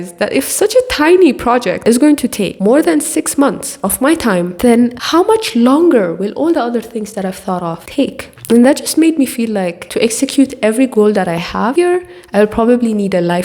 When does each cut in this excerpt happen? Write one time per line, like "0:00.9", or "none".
0:01.8
0:04.5